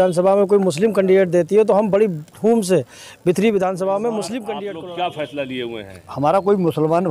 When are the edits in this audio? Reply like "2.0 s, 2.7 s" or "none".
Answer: 4.5 s